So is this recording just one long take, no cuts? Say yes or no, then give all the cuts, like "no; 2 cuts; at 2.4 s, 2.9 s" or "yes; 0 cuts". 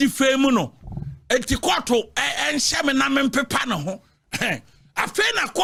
yes; 0 cuts